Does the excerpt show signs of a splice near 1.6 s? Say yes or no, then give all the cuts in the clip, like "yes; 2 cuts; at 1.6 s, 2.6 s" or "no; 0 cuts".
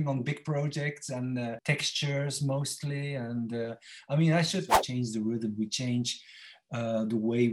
yes; 2 cuts; at 1.6 s, 4.8 s